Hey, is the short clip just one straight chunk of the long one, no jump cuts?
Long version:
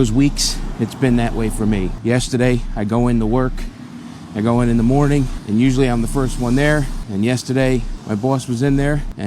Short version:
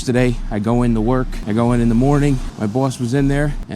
no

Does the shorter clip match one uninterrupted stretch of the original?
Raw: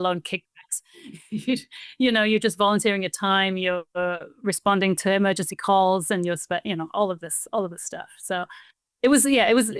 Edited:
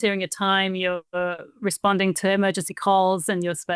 yes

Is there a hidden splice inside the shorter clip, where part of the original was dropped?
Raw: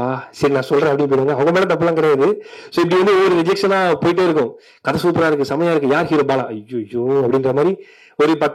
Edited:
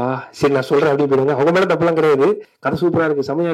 yes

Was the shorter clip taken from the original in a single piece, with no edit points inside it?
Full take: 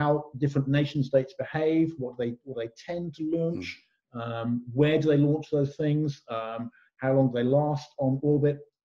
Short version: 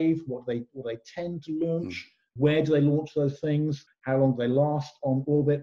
no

